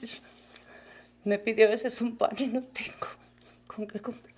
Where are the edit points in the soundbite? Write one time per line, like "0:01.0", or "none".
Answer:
none